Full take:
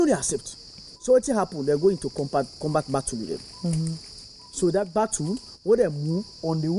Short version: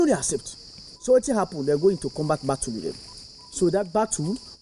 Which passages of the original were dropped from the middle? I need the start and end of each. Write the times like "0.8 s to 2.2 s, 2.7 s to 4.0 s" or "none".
2.1 s to 2.5 s, 3.5 s to 4.1 s